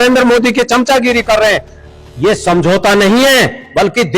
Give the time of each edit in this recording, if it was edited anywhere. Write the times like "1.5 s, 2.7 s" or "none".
1.7 s

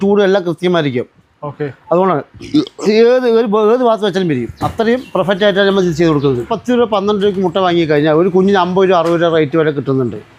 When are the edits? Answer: none

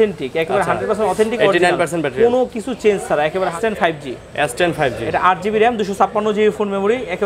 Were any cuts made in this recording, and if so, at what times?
3.6 s

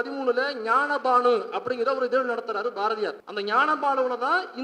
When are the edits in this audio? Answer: 3.2 s

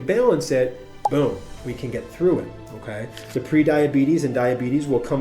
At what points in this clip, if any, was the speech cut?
3.2 s

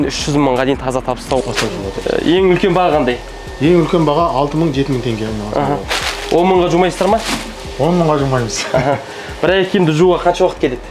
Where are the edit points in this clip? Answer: 1.4 s

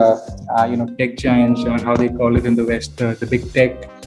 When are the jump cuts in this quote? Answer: none

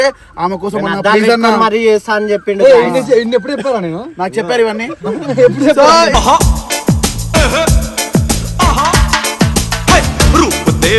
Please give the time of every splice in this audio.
none

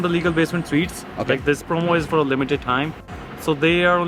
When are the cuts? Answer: none

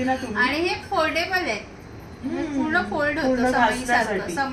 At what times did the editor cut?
none

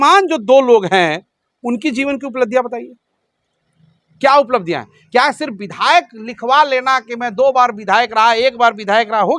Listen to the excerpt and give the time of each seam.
none

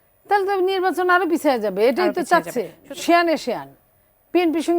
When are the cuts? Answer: 2.8 s

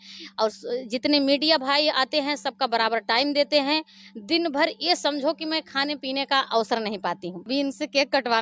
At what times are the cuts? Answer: 7.3 s

